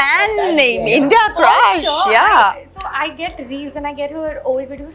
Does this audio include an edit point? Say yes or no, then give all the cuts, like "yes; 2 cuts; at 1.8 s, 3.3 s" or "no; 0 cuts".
no; 0 cuts